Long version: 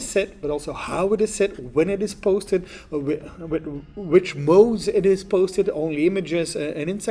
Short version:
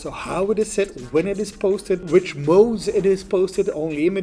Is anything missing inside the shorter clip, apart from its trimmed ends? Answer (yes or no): yes